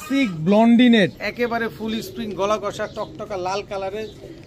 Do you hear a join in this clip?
yes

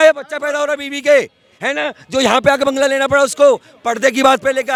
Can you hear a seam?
no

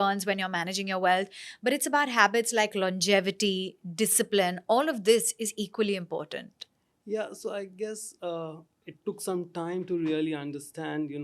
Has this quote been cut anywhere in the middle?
no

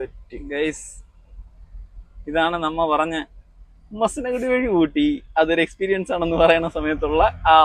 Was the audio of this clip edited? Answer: no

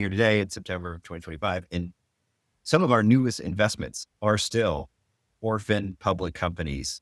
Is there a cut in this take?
no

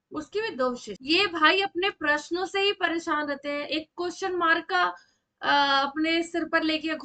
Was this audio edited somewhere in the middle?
yes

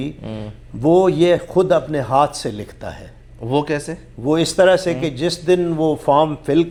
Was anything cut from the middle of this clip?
no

